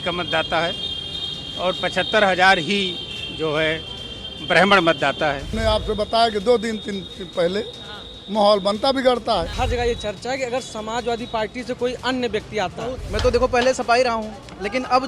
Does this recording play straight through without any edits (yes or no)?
no